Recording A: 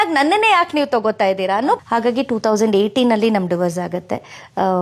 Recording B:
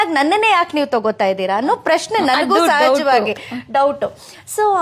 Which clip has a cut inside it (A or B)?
A